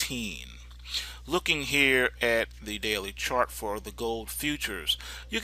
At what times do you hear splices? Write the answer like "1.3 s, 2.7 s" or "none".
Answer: 3.6 s

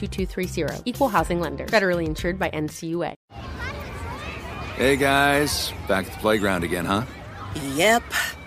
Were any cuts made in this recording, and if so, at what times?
3.2 s

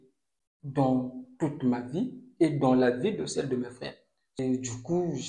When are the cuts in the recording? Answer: 4.4 s

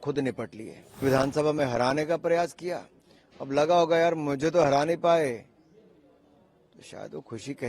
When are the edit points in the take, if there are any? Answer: 1.0 s

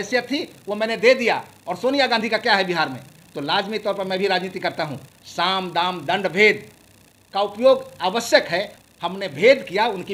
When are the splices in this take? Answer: 8.8 s

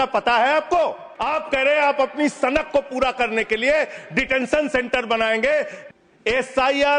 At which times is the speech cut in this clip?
1.1 s, 5.8 s

